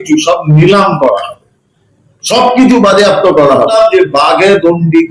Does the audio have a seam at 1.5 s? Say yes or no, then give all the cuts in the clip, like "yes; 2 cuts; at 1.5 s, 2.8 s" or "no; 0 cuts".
no; 1 cut; at 3.6 s